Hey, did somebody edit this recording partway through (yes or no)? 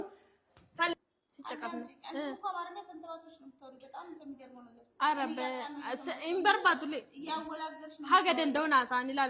yes